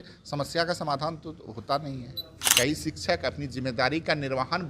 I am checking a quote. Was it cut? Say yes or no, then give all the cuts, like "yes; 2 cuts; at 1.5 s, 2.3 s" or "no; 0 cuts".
yes; 1 cut; at 2.4 s